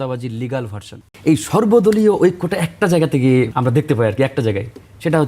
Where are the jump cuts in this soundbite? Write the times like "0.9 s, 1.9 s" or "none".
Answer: 0.9 s, 3.5 s